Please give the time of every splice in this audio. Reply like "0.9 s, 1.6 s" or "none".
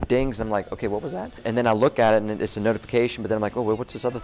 1.4 s